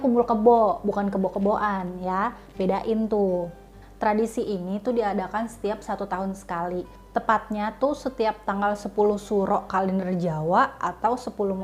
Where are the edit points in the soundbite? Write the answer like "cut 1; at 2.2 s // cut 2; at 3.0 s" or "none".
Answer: none